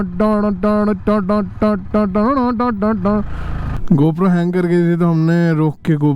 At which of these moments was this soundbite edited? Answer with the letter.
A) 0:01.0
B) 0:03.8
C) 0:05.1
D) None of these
B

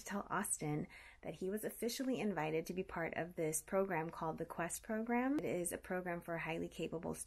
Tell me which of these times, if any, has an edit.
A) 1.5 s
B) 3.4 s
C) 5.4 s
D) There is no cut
C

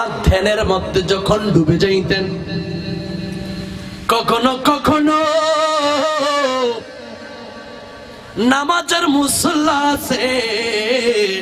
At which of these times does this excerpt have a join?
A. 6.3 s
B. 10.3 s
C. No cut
C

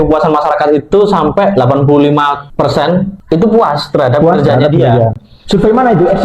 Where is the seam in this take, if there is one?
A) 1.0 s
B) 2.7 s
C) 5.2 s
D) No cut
B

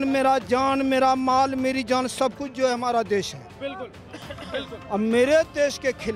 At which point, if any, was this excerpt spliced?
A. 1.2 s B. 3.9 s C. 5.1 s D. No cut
D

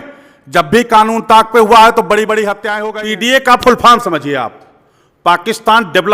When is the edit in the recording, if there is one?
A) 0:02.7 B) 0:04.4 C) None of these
A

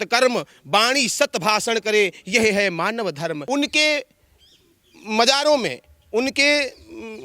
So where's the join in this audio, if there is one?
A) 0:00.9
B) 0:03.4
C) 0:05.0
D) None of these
B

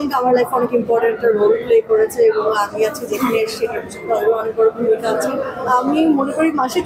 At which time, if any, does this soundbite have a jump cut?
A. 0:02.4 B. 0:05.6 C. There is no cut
B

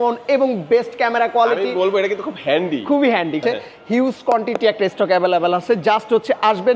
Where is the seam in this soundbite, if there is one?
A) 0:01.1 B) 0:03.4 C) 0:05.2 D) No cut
B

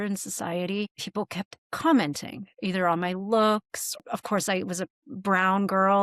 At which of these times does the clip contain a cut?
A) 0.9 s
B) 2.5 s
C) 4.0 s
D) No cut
C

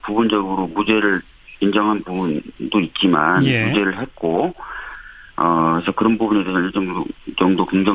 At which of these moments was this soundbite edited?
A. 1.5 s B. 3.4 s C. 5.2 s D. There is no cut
A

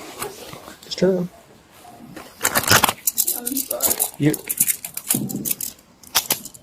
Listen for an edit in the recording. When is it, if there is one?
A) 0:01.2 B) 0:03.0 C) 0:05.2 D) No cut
D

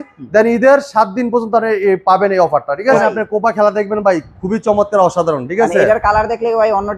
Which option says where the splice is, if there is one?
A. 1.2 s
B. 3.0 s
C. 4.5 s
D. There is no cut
B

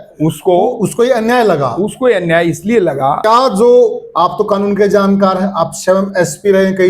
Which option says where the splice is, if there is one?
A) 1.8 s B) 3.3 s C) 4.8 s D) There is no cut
B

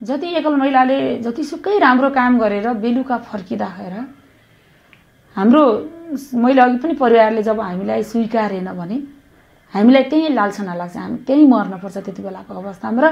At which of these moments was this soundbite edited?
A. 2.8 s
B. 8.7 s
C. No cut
C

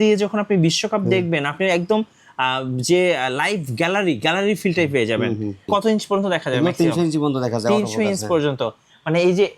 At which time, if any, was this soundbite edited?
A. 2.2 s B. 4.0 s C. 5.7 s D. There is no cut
C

